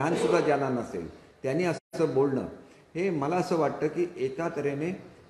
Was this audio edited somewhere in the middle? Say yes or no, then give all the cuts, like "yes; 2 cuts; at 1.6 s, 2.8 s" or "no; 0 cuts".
no; 0 cuts